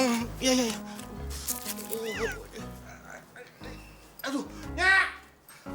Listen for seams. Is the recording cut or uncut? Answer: cut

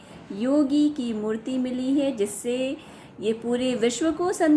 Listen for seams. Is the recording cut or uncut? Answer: uncut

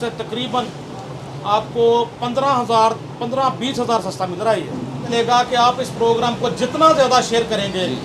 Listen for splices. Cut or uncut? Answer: cut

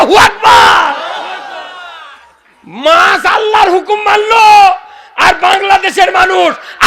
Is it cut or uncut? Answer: uncut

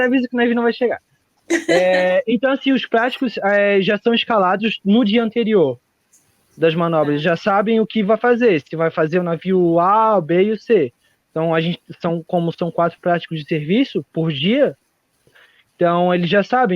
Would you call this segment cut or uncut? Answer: cut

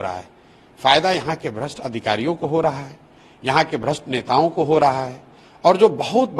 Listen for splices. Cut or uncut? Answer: uncut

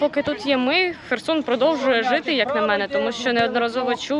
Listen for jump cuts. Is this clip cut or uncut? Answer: uncut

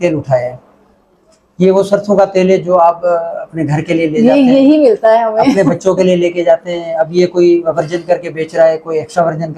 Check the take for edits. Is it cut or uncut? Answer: uncut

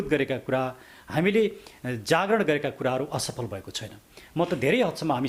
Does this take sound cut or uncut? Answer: uncut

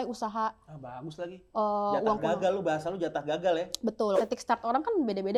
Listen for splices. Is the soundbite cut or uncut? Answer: cut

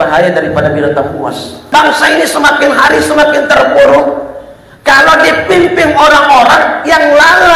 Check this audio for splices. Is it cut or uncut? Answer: cut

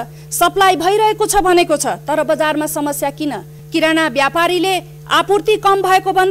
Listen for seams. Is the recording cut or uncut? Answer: cut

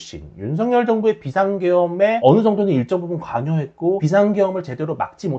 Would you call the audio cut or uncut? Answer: uncut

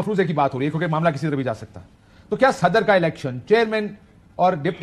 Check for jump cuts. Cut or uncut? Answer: uncut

